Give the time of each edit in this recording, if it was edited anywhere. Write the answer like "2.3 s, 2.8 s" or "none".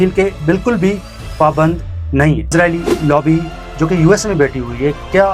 2.5 s